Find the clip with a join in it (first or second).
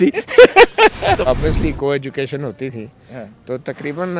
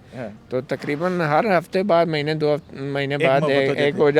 first